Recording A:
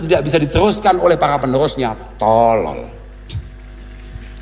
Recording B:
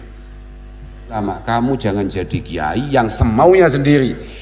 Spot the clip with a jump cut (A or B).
B